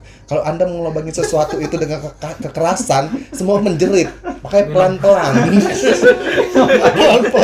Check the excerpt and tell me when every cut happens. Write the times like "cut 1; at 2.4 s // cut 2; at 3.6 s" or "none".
none